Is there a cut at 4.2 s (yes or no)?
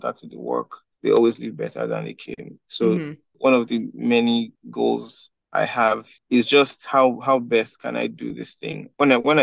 no